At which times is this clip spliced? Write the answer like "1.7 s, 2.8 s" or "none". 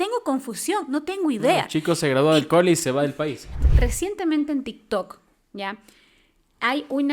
3.5 s